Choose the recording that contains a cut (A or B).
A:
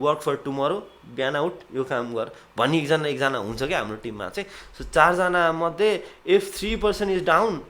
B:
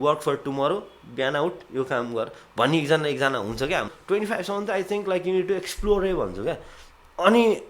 B